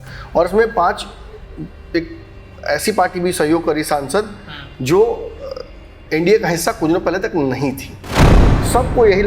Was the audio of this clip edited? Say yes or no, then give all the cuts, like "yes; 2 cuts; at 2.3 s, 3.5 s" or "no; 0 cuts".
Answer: yes; 1 cut; at 8.3 s